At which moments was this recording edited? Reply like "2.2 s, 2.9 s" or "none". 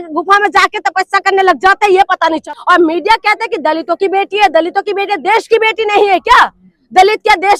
2.4 s

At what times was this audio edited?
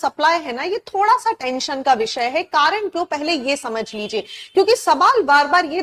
none

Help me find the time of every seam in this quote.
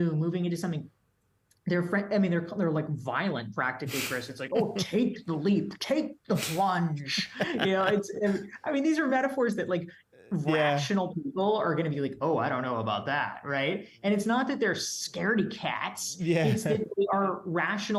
none

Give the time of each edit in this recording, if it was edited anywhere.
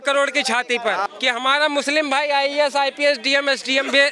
1.0 s

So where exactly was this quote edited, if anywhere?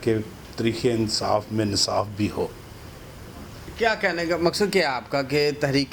none

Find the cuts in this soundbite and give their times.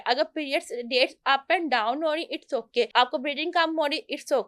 2.9 s

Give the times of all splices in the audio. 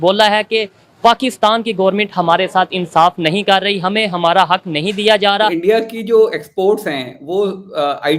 5.6 s

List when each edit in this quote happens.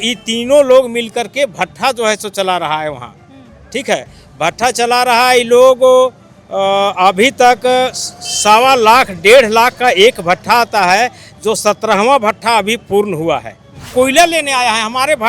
13.9 s

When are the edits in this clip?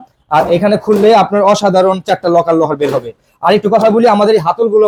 none

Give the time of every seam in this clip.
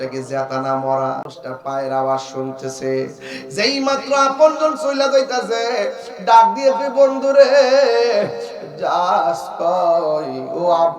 1.3 s

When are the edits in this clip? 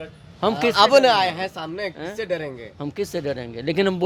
none

